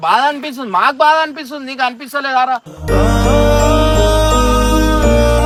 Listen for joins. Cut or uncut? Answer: uncut